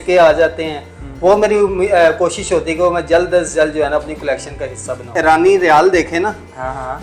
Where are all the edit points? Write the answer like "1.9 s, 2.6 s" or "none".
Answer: 5.1 s